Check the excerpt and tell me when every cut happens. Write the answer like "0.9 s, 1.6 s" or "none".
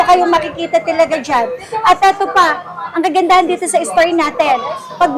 none